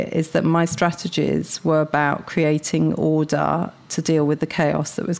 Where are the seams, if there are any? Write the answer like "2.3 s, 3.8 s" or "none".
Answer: none